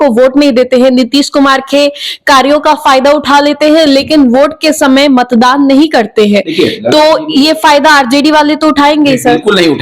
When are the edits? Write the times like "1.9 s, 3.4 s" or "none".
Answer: none